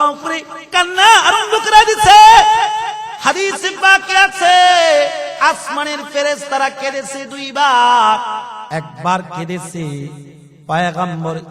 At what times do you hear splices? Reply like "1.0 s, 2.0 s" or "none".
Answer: 3.1 s, 8.6 s